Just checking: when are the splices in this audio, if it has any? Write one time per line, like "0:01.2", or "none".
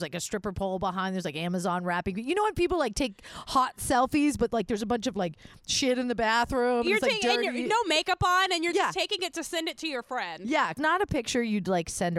0:10.8